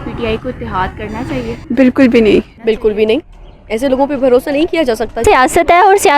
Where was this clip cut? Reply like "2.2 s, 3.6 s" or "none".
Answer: 1.6 s, 2.5 s, 5.2 s